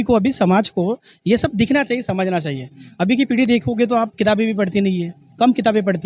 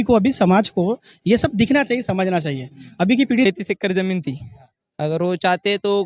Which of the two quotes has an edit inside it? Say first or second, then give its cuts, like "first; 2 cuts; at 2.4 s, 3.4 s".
second; 1 cut; at 3.5 s